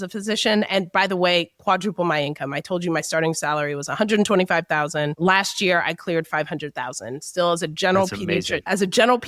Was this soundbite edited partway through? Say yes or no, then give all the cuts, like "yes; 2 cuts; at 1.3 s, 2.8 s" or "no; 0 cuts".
no; 0 cuts